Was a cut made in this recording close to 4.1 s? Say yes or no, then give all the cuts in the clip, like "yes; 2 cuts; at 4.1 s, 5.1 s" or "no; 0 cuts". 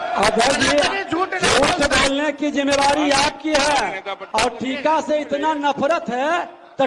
yes; 1 cut; at 4.1 s